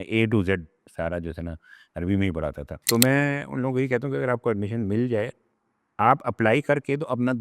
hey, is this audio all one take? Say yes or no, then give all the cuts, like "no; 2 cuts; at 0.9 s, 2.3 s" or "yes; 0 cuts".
no; 1 cut; at 2.7 s